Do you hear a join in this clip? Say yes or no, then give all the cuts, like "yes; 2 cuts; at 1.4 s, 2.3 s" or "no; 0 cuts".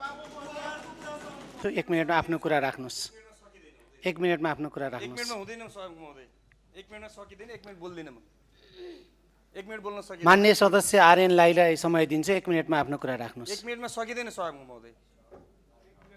yes; 1 cut; at 1.6 s